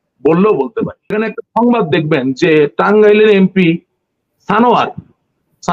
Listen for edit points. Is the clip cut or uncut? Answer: cut